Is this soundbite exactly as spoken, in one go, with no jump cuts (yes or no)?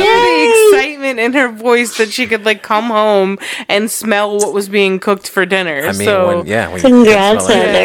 yes